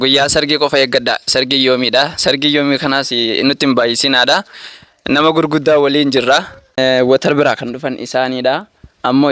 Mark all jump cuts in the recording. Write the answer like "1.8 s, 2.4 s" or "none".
6.6 s